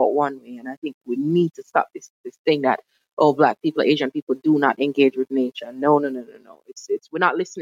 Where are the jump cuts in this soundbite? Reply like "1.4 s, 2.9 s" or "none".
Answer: none